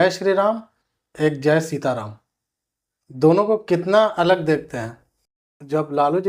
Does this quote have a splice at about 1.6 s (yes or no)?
no